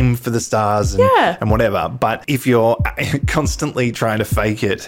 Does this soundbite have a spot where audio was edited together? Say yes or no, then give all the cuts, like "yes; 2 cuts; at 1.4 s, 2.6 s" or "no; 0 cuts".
yes; 1 cut; at 2.2 s